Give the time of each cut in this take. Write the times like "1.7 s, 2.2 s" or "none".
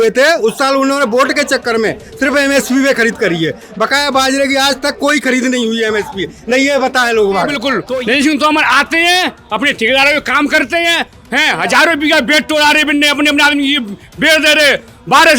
7.7 s